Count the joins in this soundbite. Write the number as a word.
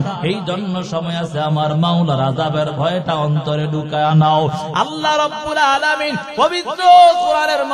zero